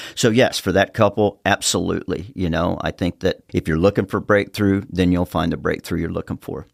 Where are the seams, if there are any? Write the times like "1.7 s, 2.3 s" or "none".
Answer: none